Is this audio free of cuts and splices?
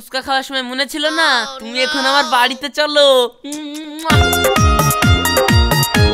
yes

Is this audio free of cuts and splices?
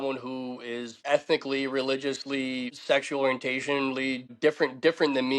no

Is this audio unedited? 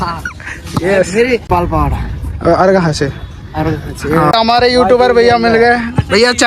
no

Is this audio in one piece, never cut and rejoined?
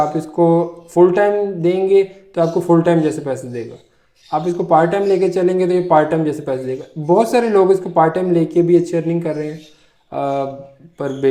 yes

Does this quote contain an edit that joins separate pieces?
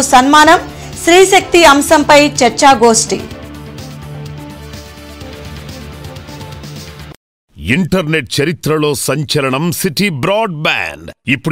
yes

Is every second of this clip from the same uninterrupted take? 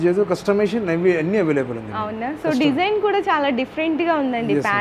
yes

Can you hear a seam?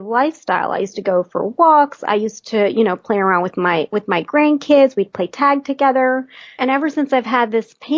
yes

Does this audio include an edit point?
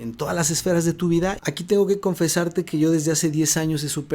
yes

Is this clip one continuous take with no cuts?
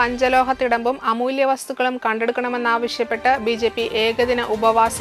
yes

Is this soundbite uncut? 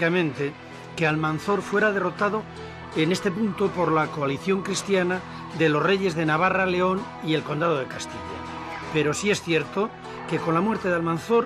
no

